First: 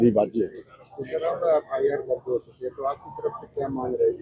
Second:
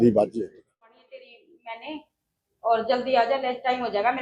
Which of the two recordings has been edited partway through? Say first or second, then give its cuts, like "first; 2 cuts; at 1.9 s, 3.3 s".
second; 1 cut; at 1.0 s